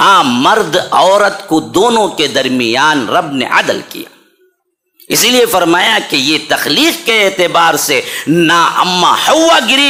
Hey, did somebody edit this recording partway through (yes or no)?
no